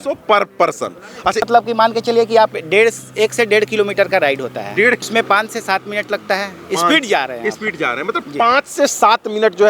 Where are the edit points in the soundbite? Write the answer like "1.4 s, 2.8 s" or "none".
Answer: 1.5 s, 5.0 s